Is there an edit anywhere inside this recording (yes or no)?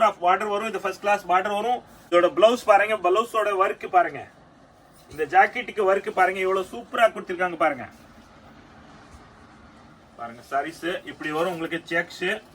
yes